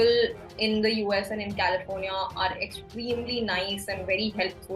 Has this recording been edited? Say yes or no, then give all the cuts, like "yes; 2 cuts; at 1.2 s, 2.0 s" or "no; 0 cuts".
no; 0 cuts